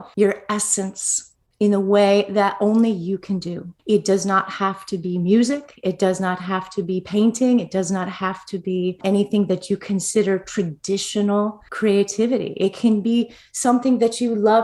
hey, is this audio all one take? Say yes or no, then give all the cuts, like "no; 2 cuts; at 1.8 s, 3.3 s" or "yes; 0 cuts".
yes; 0 cuts